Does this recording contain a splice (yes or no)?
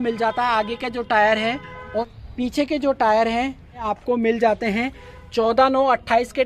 yes